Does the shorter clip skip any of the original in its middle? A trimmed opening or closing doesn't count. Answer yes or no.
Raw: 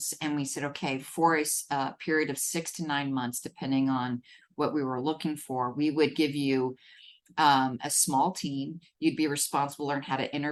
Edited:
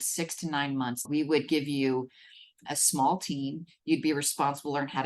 yes